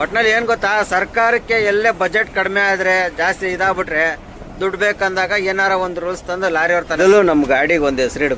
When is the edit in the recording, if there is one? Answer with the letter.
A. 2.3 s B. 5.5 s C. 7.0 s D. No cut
C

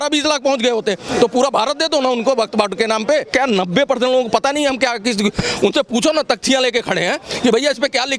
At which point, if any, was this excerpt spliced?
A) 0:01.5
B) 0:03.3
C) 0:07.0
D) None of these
B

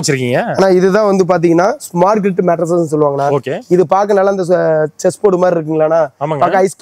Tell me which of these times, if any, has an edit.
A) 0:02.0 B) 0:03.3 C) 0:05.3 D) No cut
D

